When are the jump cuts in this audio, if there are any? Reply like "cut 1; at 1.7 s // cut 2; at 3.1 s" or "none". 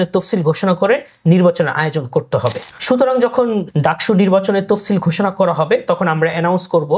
cut 1; at 2.7 s // cut 2; at 3.7 s